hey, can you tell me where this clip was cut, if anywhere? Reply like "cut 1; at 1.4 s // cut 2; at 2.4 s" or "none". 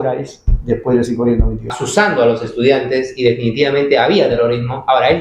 cut 1; at 1.8 s